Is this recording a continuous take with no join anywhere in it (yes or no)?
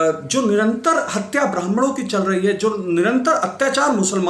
yes